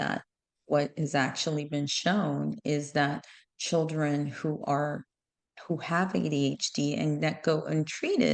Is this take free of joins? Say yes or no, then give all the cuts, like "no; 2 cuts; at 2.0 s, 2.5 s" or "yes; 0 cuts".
yes; 0 cuts